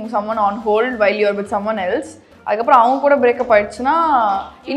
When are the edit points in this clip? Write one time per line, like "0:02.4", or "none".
none

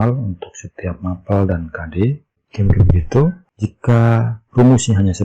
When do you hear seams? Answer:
0:02.4
0:03.5

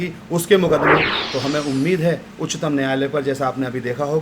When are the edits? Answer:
0:01.2

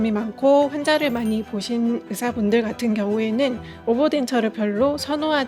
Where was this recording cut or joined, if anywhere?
none

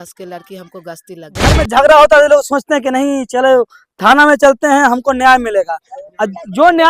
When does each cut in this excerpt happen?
0:01.6

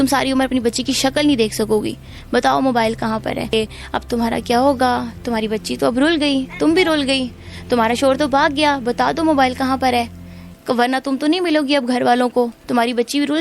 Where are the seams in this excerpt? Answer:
0:03.5

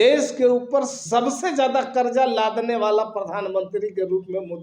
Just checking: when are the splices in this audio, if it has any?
none

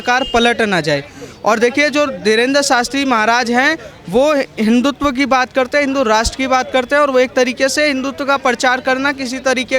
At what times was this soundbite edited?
none

